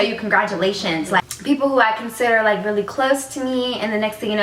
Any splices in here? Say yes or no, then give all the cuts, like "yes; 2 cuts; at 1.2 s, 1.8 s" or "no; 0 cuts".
yes; 1 cut; at 1.3 s